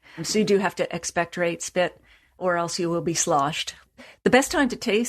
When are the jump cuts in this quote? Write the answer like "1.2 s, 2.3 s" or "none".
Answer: 2.4 s, 3.8 s